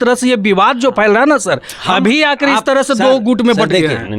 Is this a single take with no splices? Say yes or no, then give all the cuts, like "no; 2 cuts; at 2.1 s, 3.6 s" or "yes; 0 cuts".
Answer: yes; 0 cuts